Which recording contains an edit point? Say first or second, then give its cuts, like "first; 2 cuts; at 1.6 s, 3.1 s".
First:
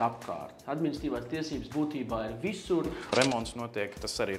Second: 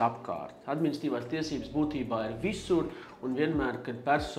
first; 1 cut; at 3.0 s